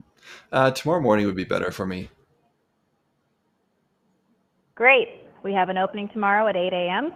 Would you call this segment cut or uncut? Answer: uncut